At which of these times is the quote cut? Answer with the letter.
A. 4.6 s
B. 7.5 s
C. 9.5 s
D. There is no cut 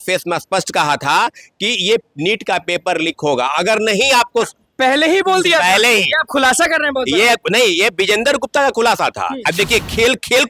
C